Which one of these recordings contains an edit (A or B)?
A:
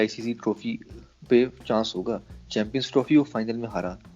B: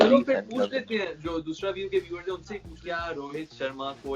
B